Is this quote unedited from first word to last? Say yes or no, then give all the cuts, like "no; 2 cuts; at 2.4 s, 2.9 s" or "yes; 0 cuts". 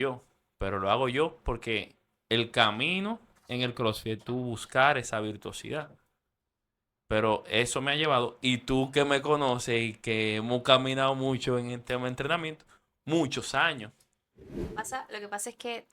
no; 1 cut; at 14.7 s